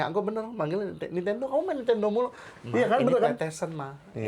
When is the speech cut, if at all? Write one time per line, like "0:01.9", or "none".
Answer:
none